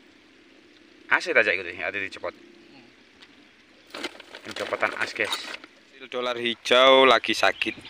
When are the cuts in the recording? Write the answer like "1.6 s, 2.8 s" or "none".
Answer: 6.3 s